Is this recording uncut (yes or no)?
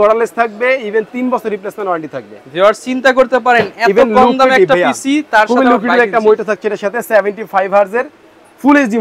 yes